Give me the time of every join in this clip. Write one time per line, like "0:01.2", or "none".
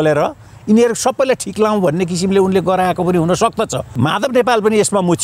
0:04.0